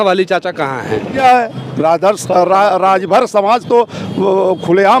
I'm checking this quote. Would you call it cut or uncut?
cut